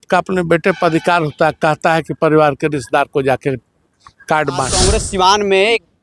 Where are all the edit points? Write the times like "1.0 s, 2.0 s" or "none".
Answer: 4.8 s